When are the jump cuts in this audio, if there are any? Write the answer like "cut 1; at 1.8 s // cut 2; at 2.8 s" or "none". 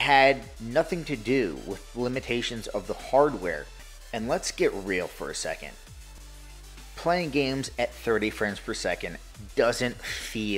cut 1; at 3.7 s // cut 2; at 6.1 s